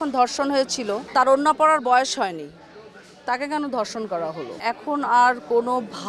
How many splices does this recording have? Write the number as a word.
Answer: two